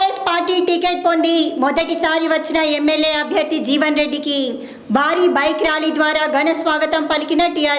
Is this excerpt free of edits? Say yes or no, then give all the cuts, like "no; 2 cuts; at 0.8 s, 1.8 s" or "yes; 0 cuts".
yes; 0 cuts